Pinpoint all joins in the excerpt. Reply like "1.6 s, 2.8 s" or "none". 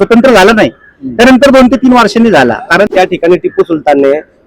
2.9 s